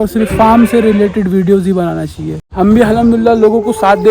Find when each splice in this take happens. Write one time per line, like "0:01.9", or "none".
0:02.4